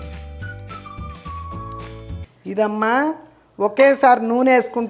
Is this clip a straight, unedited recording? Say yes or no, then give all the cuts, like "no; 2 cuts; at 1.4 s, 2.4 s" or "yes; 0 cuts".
no; 1 cut; at 2.3 s